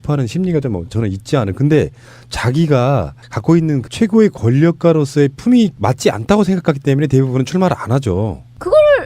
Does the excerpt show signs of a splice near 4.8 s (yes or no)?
yes